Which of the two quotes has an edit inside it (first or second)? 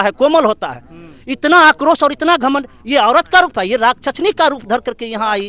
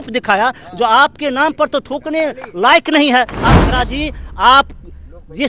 second